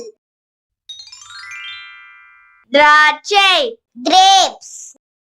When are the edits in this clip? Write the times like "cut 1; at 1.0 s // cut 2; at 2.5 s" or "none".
cut 1; at 0.9 s // cut 2; at 2.4 s